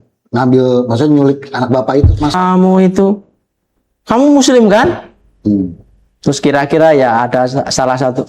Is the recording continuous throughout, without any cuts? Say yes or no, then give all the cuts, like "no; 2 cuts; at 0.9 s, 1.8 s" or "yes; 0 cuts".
no; 1 cut; at 2.3 s